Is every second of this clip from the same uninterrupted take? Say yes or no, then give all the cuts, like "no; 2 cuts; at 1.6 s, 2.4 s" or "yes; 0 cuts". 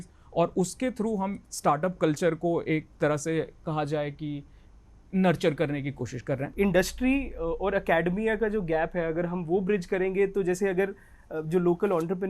no; 1 cut; at 6.5 s